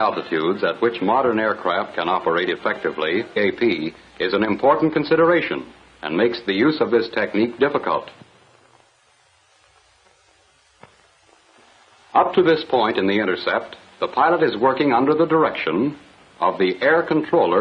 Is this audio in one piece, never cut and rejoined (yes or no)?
yes